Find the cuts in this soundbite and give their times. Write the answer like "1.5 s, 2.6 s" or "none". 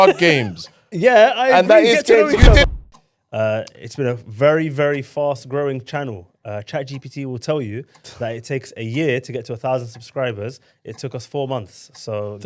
2.6 s

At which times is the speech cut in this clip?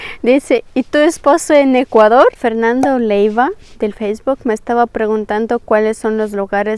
2.4 s

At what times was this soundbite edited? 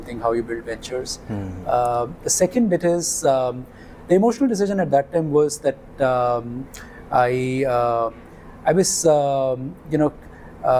none

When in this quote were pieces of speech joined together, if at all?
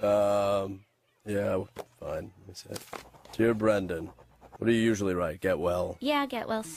5.8 s

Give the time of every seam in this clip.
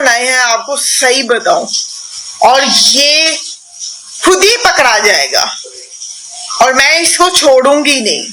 none

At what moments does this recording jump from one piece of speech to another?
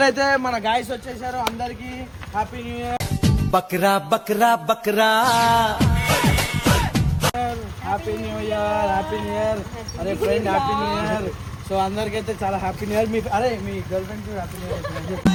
none

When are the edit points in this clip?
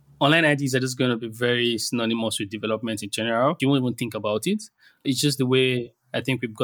3.6 s, 5.0 s

